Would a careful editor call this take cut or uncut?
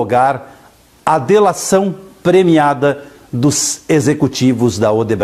cut